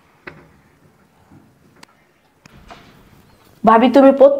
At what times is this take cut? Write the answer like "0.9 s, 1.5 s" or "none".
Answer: 0.8 s, 1.8 s